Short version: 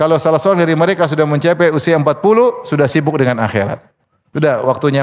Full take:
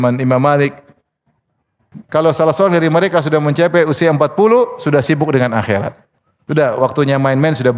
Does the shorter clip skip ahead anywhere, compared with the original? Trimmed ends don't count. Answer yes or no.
no